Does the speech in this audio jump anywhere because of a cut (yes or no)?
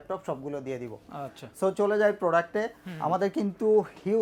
no